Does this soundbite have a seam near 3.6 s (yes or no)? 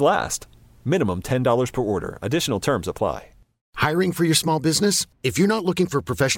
yes